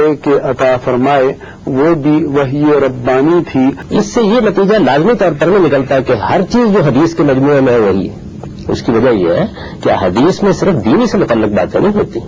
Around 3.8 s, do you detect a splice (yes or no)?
yes